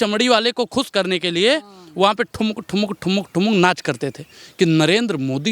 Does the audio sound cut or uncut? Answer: cut